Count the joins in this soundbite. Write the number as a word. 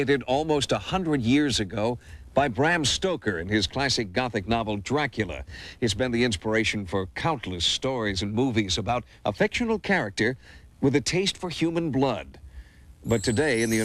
one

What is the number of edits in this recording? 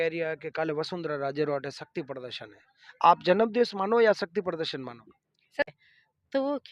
one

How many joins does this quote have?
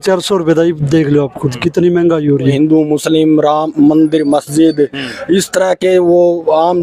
one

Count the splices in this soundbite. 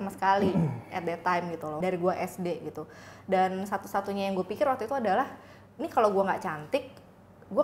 one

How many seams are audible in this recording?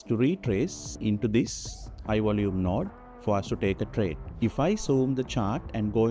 two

